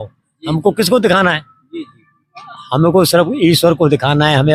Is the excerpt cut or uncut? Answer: uncut